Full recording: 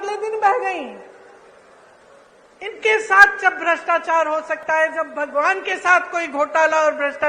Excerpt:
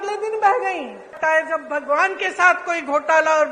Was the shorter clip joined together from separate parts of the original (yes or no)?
yes